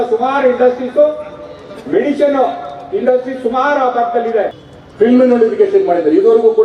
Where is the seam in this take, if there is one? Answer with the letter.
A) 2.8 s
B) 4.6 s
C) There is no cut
B